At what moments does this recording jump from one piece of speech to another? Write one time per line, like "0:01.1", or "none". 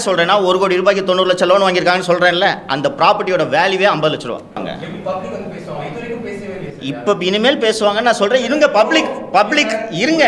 0:04.6